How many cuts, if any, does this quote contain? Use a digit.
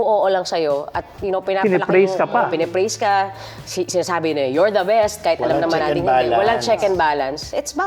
0